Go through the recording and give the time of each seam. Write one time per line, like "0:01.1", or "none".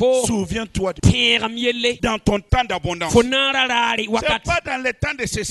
0:01.0
0:02.0